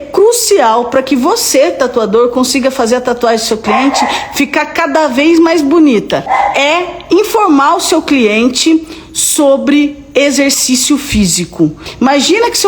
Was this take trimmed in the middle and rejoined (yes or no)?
yes